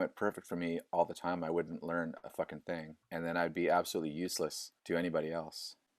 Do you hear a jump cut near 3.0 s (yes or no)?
yes